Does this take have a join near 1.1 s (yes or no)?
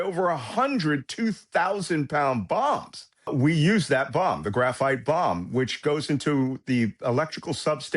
no